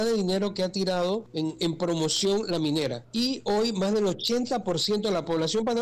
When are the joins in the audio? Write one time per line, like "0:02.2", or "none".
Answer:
0:01.3
0:03.0